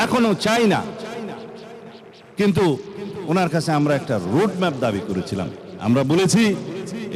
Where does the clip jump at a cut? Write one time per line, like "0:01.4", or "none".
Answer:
0:05.6

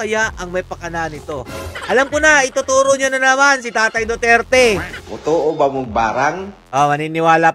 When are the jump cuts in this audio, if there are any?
0:05.0
0:06.5

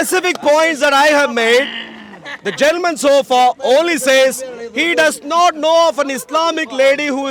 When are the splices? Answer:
none

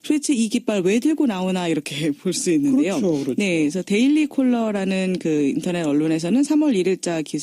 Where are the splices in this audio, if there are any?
0:04.3

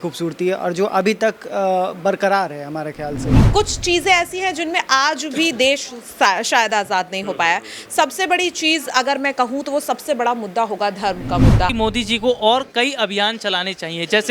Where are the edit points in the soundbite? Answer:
0:03.4
0:11.7

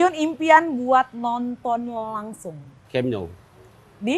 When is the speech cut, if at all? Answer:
0:02.7

